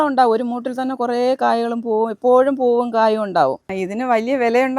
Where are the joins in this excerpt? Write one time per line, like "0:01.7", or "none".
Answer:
0:03.6